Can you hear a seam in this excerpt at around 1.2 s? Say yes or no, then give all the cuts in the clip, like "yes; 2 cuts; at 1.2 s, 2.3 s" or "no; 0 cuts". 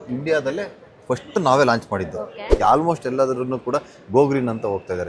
no; 1 cut; at 2.5 s